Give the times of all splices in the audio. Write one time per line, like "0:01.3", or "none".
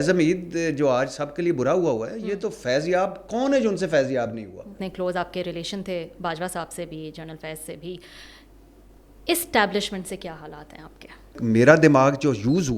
0:04.8
0:11.4